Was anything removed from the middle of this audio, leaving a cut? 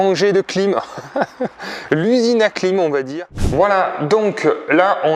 yes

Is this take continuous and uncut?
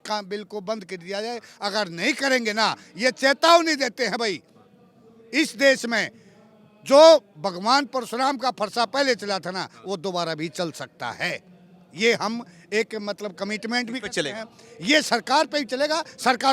yes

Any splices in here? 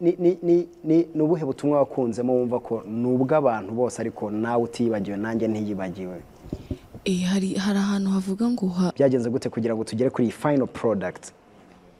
yes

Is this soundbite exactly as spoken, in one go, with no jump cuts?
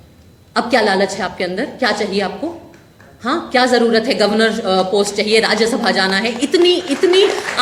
yes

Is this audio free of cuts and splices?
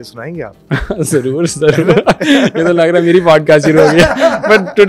yes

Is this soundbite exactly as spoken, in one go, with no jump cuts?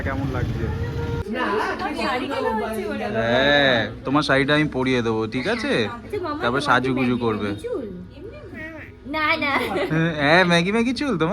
no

